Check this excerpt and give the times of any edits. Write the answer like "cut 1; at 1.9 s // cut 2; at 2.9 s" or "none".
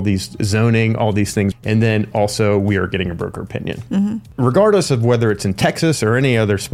cut 1; at 1.6 s // cut 2; at 4.3 s

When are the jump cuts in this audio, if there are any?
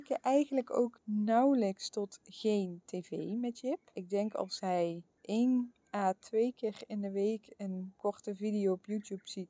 cut 1; at 1.0 s // cut 2; at 4.0 s // cut 3; at 5.1 s // cut 4; at 5.8 s // cut 5; at 7.9 s

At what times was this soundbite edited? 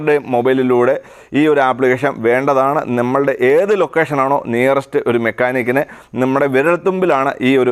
none

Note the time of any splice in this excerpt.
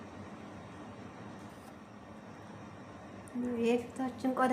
cut 1; at 2.2 s

